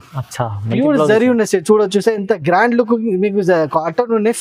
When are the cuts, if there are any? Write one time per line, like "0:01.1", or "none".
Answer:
none